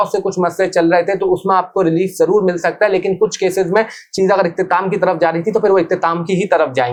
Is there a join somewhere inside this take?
no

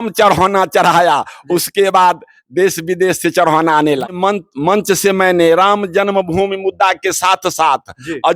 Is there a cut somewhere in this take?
yes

